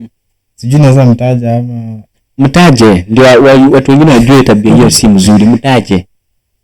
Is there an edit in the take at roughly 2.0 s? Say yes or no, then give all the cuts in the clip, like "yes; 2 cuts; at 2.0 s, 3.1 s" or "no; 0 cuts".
no; 0 cuts